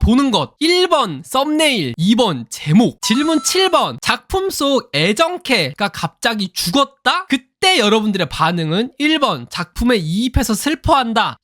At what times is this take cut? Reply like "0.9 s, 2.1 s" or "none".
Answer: 3.0 s, 5.7 s